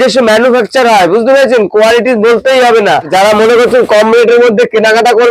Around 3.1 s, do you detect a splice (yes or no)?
yes